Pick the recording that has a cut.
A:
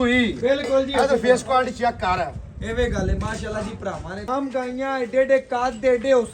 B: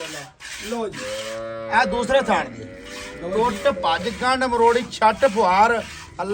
A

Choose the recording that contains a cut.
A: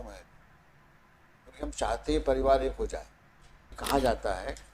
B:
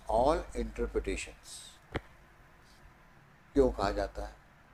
A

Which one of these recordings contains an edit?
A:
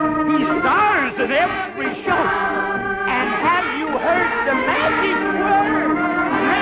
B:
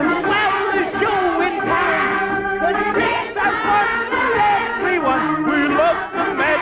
B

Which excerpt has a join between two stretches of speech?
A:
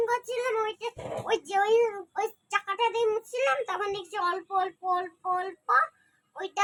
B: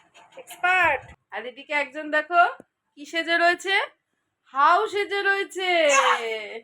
B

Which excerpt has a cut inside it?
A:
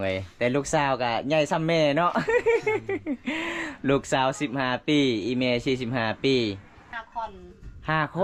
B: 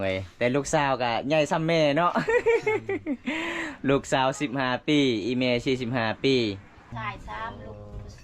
B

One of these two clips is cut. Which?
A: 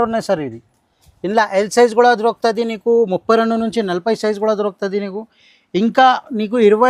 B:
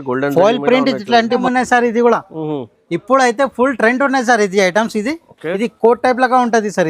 B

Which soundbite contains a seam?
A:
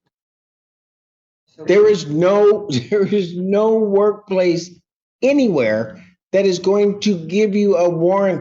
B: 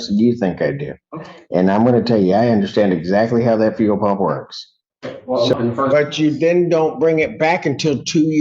B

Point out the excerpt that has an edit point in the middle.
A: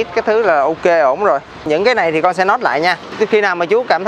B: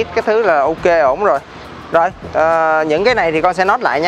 A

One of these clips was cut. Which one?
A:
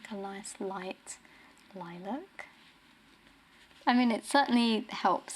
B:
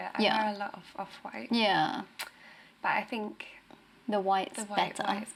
A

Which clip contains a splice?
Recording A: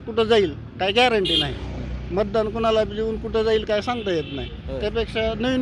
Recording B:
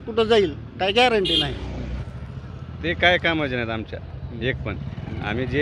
B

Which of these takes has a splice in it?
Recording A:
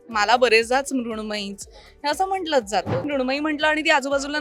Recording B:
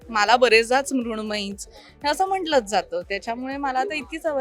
A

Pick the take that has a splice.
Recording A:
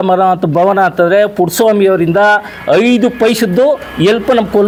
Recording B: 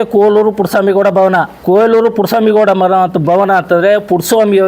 B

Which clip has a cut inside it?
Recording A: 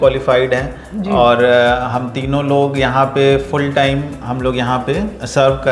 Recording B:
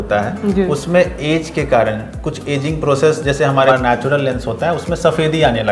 B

